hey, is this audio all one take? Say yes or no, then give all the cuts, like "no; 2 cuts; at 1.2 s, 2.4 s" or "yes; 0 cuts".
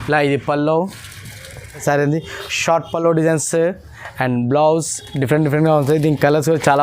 no; 1 cut; at 1.8 s